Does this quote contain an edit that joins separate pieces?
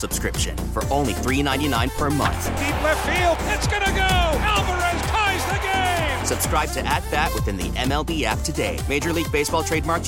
no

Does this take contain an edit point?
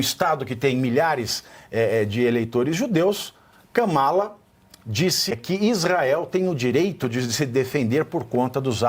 yes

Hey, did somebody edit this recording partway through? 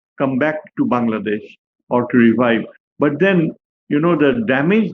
no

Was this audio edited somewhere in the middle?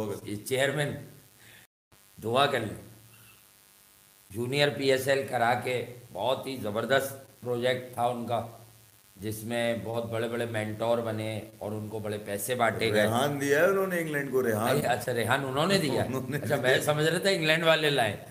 no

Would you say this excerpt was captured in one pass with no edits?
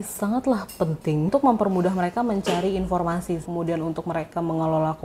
no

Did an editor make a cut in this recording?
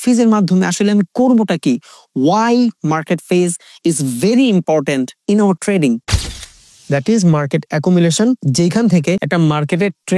yes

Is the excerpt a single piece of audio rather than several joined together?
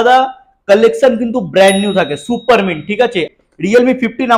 no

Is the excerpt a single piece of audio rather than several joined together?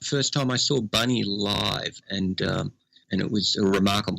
no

